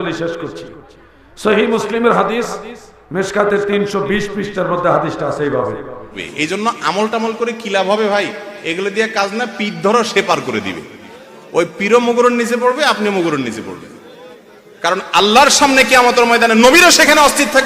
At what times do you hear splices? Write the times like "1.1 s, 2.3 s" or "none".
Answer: 6.2 s